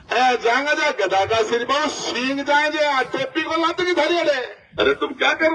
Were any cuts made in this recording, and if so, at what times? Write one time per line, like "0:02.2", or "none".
0:04.6